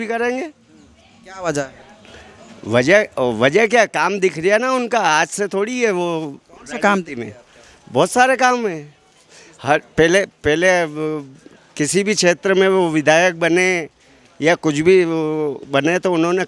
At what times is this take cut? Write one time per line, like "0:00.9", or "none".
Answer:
none